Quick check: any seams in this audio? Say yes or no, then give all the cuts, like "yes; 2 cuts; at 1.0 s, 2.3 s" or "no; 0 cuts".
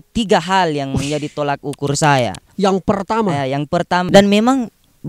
yes; 2 cuts; at 2.5 s, 4.1 s